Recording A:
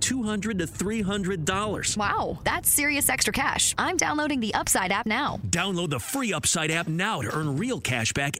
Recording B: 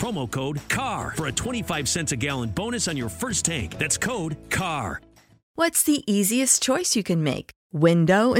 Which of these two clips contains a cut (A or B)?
B